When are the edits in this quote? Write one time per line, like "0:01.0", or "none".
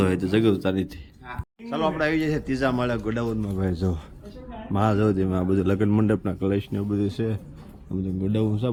none

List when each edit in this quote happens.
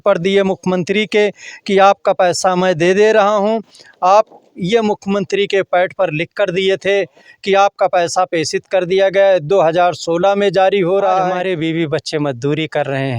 0:11.2

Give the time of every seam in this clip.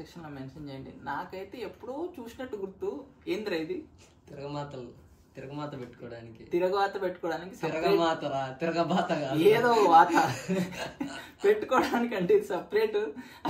none

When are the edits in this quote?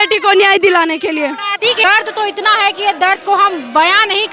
0:01.8

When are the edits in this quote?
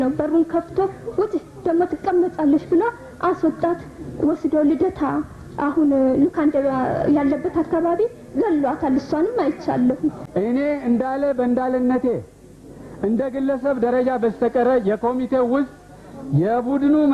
0:10.2

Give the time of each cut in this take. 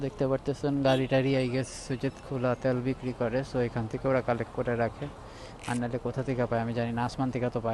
none

